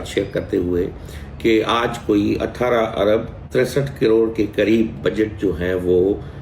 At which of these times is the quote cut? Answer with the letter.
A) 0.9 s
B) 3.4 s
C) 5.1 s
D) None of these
B